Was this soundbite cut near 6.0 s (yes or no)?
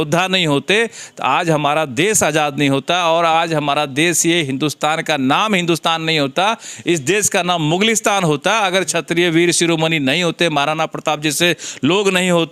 no